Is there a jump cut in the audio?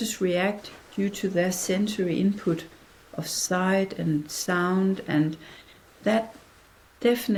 no; 0 cuts

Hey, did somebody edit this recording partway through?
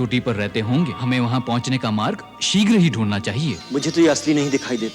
yes; 2 cuts; at 1.0 s, 3.6 s

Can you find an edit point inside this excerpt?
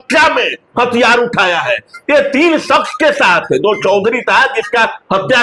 no; 0 cuts

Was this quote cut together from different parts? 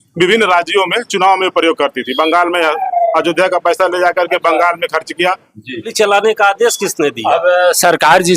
yes; 1 cut; at 5.9 s

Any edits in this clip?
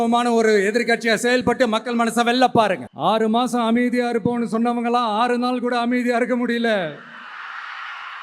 yes; 1 cut; at 2.9 s

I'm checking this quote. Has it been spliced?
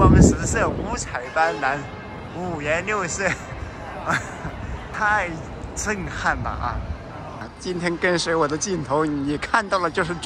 yes; 2 cuts; at 4.9 s, 7.5 s

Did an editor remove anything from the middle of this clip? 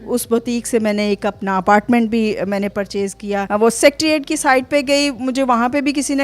yes; 1 cut; at 3.5 s

